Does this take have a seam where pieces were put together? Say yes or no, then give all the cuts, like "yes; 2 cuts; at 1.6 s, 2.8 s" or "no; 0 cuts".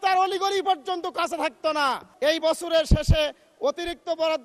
yes; 1 cut; at 2.0 s